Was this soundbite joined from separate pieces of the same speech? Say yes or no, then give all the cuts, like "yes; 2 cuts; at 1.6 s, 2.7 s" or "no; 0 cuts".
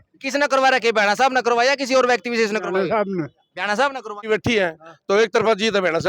yes; 1 cut; at 4.2 s